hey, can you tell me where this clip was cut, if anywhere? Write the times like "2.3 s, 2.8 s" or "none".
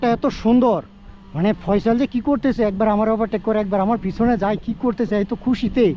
none